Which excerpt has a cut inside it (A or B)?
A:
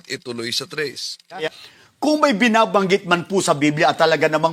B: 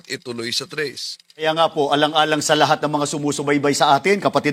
A